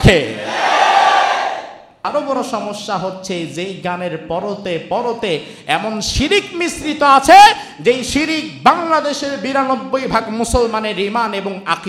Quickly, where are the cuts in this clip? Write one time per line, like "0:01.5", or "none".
0:02.0

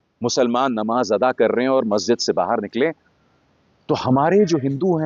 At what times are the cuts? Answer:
none

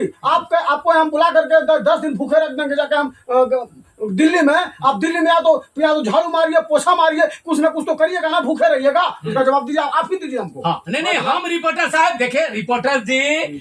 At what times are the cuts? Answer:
none

